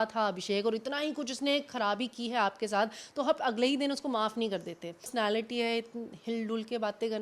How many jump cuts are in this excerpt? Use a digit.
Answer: 1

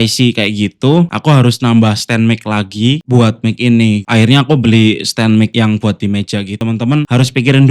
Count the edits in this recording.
1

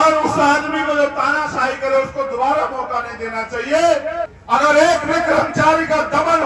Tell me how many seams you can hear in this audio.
1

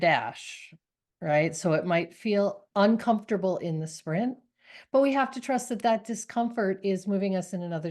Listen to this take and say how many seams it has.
1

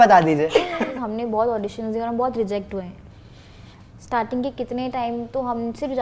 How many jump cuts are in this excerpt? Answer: 1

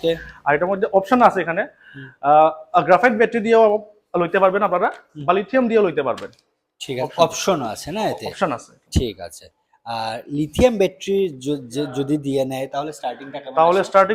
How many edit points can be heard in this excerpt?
0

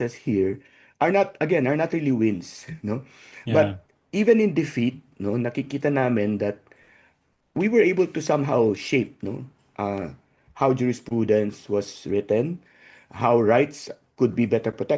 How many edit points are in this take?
0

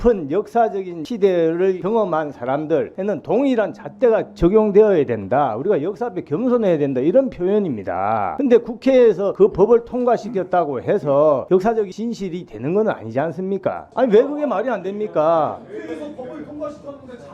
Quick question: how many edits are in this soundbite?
3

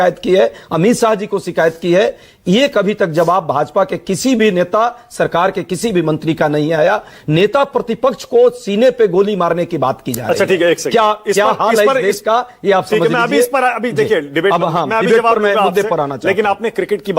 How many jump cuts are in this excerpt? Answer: 1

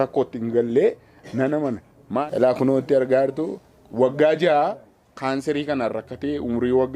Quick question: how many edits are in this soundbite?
1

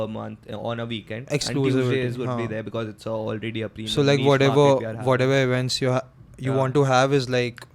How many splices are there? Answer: 0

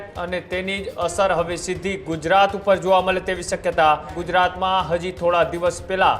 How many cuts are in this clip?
1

